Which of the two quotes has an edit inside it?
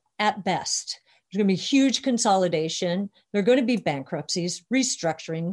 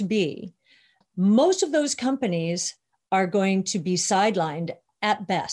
second; 1 cut; at 1.0 s

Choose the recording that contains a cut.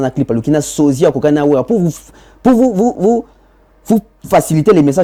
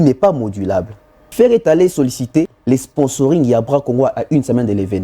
second; 2 cuts; at 1.2 s, 2.6 s

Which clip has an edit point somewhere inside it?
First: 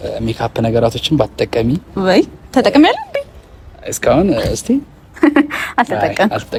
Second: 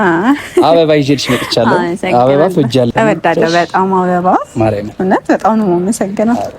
second; 1 cut; at 2.9 s

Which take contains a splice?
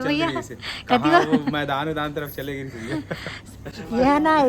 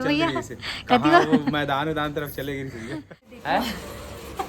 second; 1 cut; at 3.3 s

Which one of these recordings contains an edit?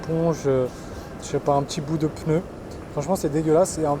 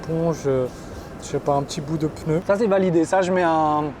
second; 1 cut; at 2.4 s

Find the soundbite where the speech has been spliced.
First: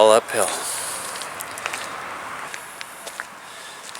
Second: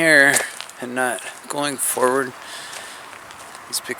first; 1 cut; at 2.5 s

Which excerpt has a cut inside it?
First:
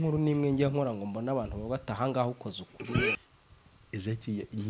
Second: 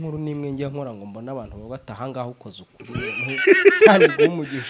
first; 1 cut; at 3.2 s

